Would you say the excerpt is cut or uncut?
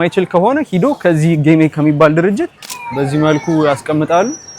cut